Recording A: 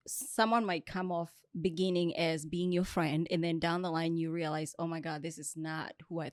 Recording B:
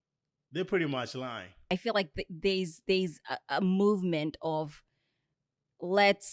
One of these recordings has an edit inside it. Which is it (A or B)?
B